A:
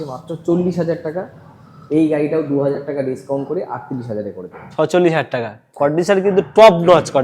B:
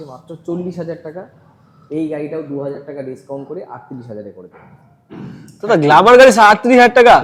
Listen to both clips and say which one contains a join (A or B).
A